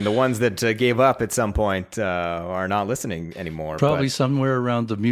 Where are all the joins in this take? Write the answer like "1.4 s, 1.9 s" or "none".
3.7 s